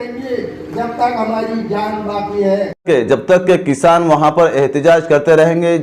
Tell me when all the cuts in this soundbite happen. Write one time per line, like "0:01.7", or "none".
0:02.8